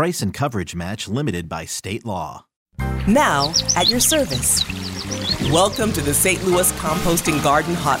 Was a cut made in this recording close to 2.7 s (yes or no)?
yes